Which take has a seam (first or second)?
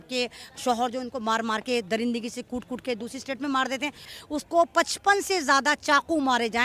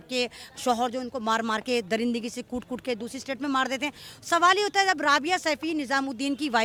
first